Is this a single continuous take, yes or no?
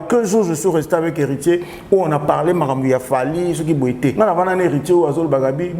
no